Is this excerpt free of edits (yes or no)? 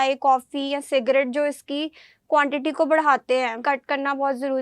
no